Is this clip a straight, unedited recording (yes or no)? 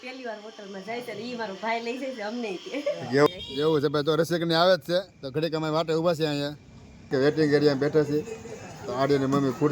no